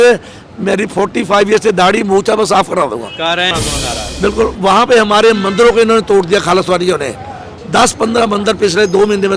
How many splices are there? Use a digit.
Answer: 1